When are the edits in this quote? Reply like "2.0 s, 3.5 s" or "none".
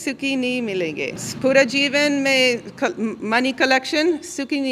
1.3 s